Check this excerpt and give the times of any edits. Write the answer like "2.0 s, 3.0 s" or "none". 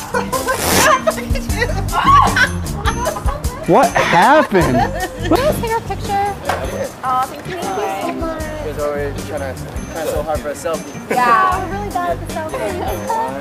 2.9 s